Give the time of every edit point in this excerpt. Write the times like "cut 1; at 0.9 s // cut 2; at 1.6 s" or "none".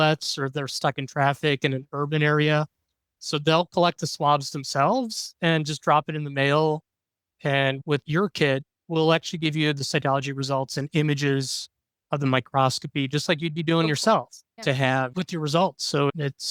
cut 1; at 8.1 s